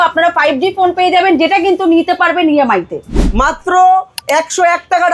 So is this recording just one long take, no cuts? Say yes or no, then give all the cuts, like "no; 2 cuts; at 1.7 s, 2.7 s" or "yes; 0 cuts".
no; 1 cut; at 3.2 s